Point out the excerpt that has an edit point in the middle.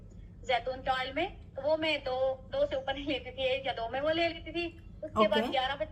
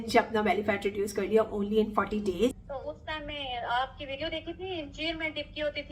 second; 1 cut; at 2.7 s

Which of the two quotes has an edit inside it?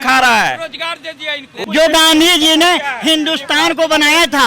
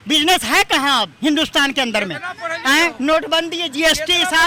first; 1 cut; at 1.6 s

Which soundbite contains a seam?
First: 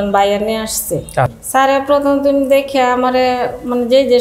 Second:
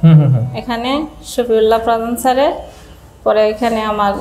first; 1 cut; at 1.4 s

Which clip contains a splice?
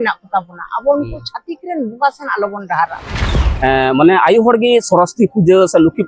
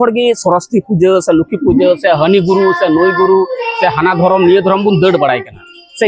first; 1 cut; at 3.5 s

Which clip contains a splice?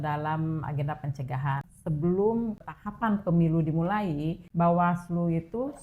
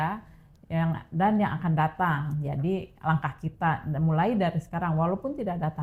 first; 3 cuts; at 1.7 s, 2.7 s, 4.4 s

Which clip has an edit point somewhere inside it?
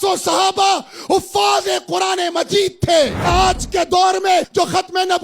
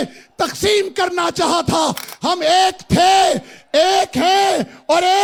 first; 2 cuts; at 3.3 s, 4.5 s

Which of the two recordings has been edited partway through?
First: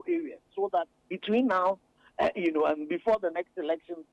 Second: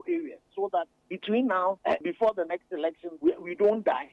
second; 2 cuts; at 2.0 s, 3.1 s

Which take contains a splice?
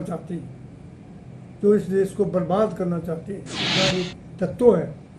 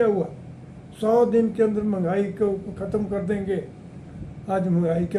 first; 1 cut; at 3.7 s

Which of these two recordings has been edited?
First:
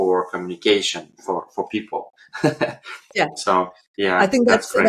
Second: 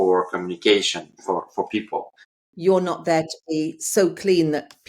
second; 1 cut; at 2.2 s

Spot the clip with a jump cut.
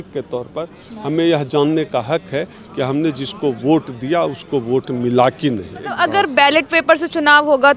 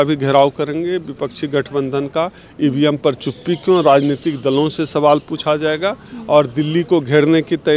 first; 1 cut; at 5.9 s

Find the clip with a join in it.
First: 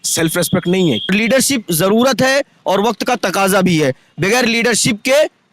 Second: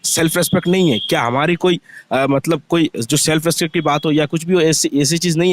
first; 1 cut; at 1.1 s

